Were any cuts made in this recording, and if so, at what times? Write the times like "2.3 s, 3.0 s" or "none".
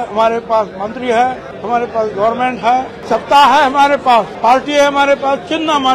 1.5 s, 3.0 s, 4.3 s